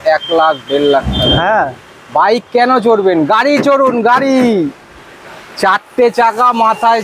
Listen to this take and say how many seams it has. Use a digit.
0